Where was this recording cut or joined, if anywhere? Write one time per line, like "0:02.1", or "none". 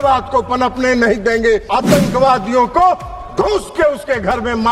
0:01.7

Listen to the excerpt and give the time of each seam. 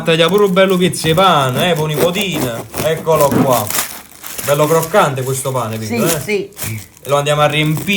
none

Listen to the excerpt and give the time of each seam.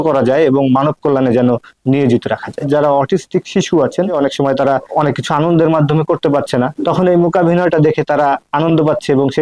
0:02.7
0:04.7
0:06.7

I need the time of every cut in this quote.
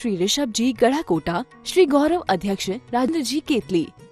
0:03.1

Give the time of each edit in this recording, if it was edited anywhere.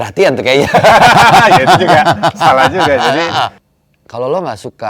0:03.6

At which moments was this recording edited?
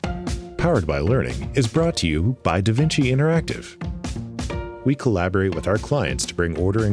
0:04.6

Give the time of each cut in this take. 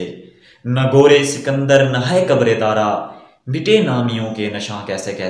none

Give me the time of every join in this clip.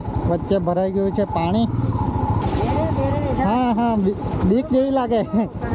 0:02.4

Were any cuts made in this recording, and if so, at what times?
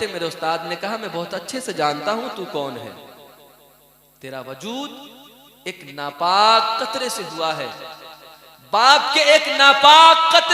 none

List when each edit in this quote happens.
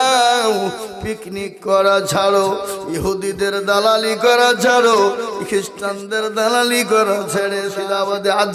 0:07.6

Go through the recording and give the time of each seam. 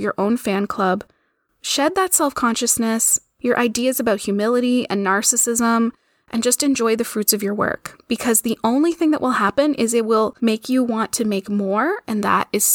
0:10.3

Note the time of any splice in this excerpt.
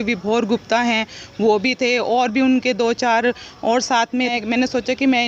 0:04.3

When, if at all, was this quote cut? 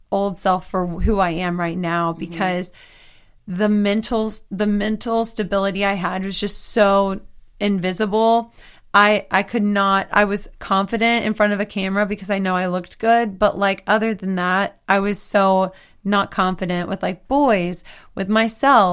none

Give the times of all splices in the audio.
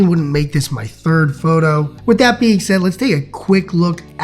0:01.9

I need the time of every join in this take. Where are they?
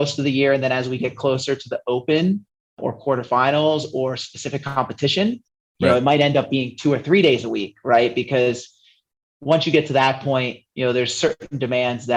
none

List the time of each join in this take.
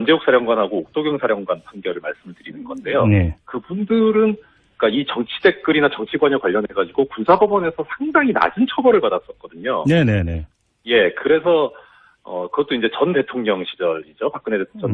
0:03.8

